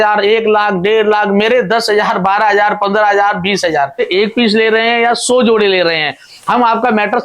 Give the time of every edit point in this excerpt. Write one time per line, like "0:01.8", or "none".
0:04.0